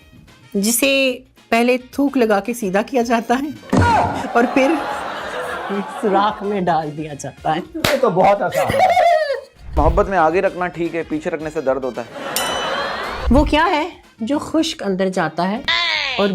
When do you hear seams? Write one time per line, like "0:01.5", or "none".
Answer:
0:09.8
0:13.1